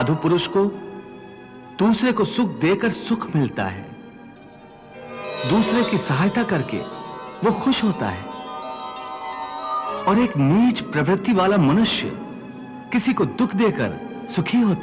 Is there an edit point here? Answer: yes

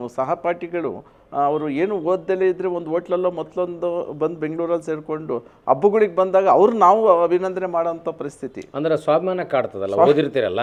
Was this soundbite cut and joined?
no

